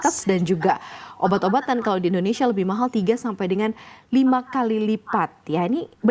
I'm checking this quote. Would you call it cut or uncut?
uncut